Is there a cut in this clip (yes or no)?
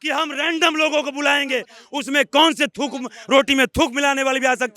no